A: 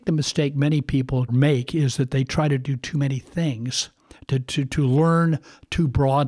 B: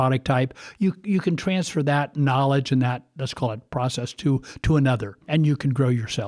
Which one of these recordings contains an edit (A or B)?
B